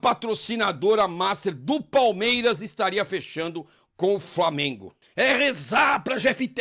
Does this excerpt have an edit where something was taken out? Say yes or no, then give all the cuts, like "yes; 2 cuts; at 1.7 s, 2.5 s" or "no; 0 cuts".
no; 0 cuts